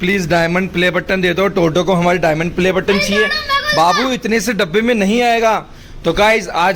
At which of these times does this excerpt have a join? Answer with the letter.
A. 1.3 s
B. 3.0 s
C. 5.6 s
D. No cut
D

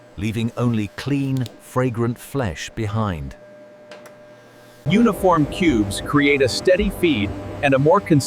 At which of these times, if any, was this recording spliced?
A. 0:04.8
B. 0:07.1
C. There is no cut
A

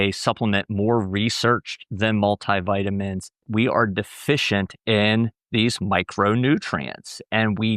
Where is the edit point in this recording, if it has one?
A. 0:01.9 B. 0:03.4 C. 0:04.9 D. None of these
B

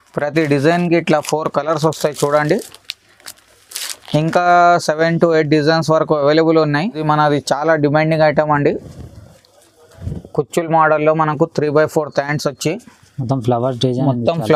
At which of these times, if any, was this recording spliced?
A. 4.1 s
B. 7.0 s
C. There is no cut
B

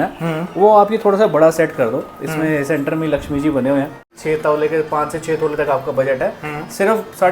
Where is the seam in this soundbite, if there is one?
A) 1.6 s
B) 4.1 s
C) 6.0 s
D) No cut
B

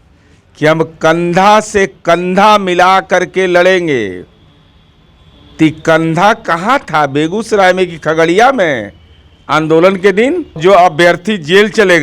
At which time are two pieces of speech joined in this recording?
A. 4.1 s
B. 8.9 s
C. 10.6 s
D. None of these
C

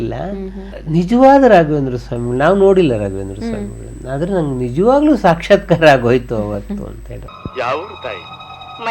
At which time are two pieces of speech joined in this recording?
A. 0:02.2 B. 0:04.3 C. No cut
C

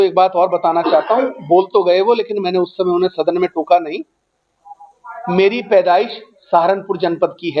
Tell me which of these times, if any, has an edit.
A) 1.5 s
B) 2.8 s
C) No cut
C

